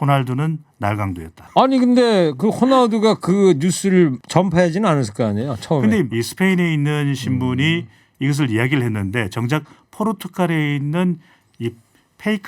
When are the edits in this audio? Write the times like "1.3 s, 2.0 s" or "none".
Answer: 1.3 s, 4.2 s, 6.1 s

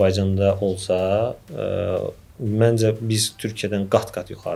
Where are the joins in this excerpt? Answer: none

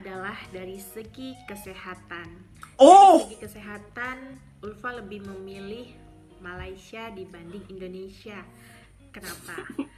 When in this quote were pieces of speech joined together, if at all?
none

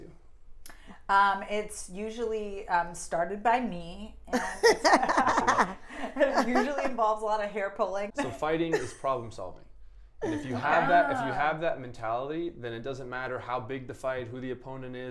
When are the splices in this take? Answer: 8.1 s

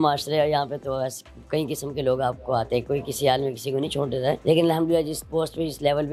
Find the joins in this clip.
4.4 s

